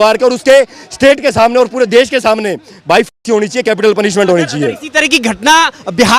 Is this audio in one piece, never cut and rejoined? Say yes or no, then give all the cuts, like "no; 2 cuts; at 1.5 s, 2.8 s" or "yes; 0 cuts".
yes; 0 cuts